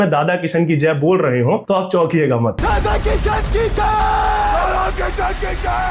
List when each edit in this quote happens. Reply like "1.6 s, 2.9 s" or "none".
1.6 s, 2.6 s